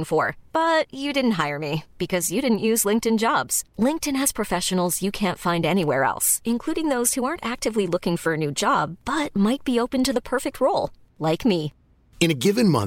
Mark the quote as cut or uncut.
uncut